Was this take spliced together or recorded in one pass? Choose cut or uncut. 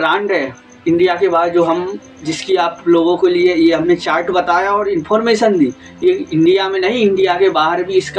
uncut